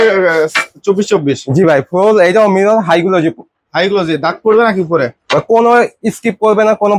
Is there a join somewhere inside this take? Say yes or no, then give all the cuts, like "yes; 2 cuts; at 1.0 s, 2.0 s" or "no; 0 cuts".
no; 0 cuts